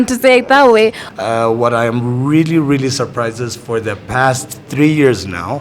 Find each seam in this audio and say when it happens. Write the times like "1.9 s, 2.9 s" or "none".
1.0 s

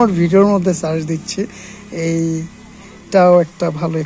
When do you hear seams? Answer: none

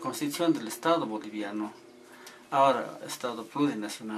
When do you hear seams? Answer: none

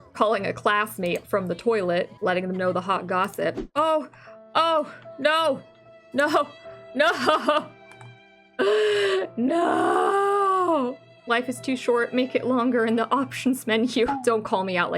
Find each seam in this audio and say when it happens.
3.6 s, 11.3 s

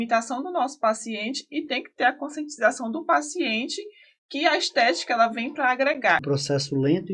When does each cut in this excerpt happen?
6.2 s

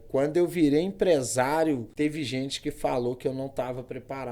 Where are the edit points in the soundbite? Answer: 1.9 s

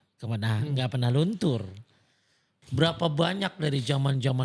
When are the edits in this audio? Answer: none

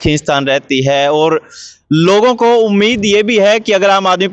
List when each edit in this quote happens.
none

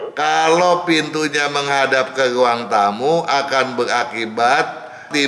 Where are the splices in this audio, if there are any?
none

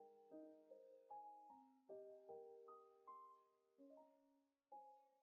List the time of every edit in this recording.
none

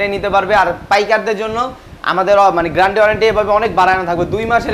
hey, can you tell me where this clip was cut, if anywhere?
none

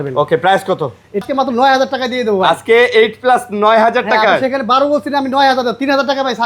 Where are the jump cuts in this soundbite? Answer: 1.2 s

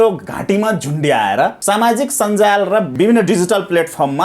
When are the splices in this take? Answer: 1.6 s, 2.9 s

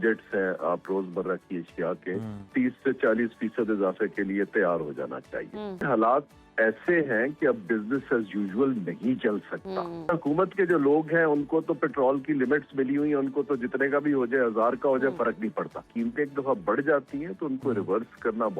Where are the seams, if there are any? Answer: 0.8 s, 2.5 s, 5.9 s, 10.1 s, 15.9 s

